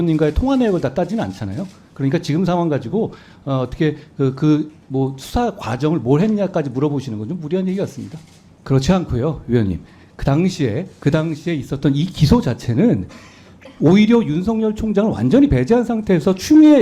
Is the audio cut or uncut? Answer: cut